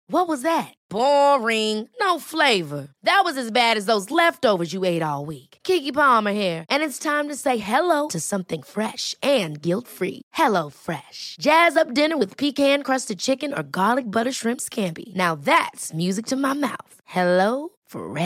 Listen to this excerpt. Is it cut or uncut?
uncut